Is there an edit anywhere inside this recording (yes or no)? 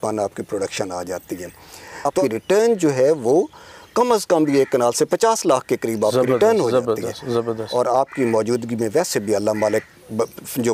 yes